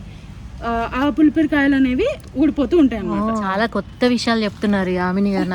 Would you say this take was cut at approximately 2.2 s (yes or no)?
no